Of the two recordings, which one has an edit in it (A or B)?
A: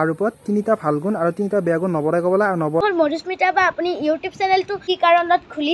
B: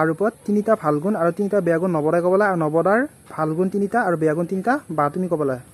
A